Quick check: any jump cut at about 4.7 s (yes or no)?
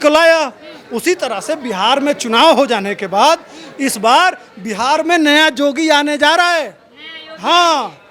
no